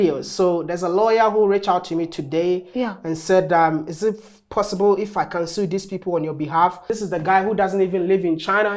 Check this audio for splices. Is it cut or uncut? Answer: cut